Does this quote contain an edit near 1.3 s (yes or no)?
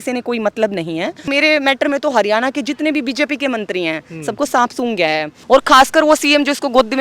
yes